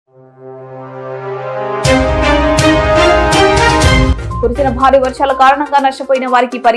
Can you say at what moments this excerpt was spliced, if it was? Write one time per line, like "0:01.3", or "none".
0:04.1